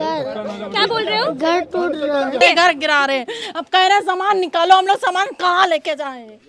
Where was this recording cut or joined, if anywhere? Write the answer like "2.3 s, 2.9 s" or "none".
2.4 s